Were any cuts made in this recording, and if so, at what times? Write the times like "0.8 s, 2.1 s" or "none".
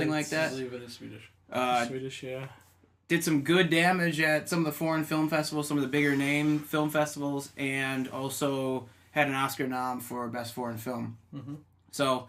none